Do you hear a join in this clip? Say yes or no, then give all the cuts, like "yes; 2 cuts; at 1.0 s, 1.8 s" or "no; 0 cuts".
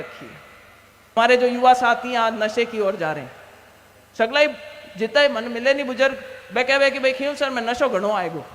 yes; 1 cut; at 1.1 s